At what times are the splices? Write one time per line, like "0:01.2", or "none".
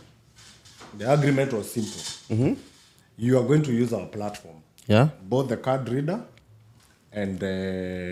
none